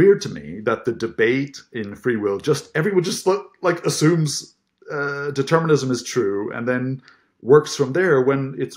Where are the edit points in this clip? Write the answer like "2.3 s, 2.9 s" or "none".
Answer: none